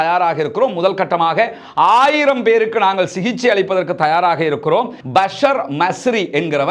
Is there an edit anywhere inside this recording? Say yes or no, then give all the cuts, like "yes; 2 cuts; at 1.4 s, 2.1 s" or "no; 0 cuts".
yes; 1 cut; at 5.0 s